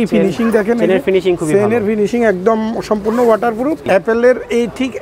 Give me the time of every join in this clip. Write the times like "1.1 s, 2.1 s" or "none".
3.8 s